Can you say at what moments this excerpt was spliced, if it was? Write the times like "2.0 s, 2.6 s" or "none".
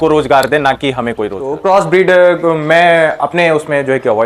1.5 s